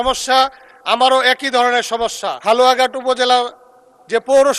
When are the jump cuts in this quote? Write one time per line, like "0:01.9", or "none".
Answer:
0:02.3